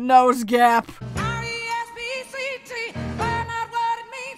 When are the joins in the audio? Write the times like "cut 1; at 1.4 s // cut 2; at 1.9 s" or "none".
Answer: cut 1; at 1.0 s

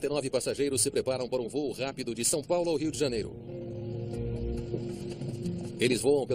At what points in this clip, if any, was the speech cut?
none

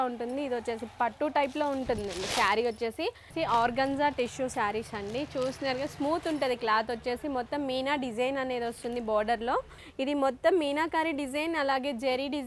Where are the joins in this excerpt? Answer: cut 1; at 3.3 s // cut 2; at 9.8 s

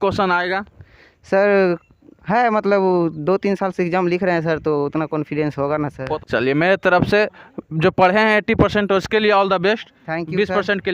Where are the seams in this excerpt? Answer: cut 1; at 6.2 s

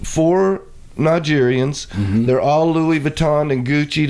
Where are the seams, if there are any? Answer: none

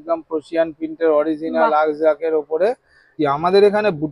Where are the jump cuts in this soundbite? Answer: cut 1; at 3.1 s

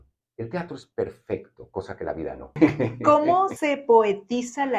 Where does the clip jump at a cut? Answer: cut 1; at 2.6 s // cut 2; at 3.6 s

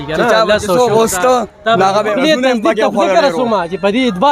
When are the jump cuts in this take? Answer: cut 1; at 2.1 s

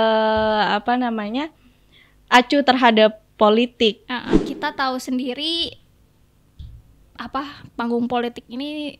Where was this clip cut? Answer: cut 1; at 4.3 s

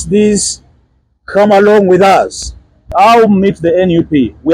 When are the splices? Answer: cut 1; at 2.9 s

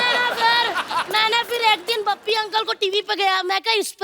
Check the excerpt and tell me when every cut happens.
cut 1; at 1.0 s

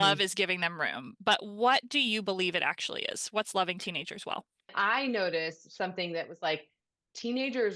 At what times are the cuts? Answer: cut 1; at 4.7 s

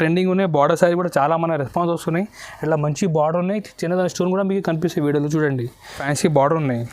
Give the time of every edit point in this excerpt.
cut 1; at 6.0 s

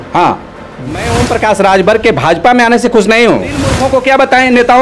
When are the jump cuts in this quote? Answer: cut 1; at 1.1 s // cut 2; at 3.8 s

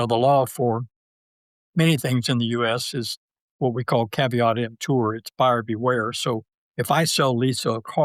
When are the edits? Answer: none

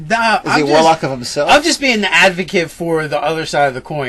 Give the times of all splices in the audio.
none

